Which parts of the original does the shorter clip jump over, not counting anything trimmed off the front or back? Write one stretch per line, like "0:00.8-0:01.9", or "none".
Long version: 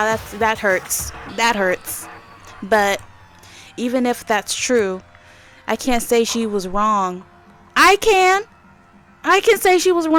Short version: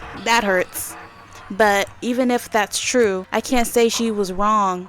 0:03.1-0:03.7
0:05.0-0:05.6